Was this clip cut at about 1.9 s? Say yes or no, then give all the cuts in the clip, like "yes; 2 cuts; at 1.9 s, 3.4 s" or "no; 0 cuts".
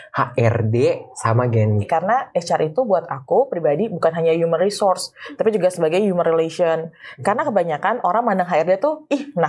yes; 1 cut; at 1.9 s